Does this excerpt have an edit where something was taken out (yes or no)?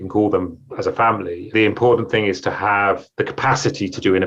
no